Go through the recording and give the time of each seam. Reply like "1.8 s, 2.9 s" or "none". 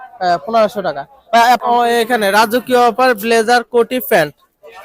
1.6 s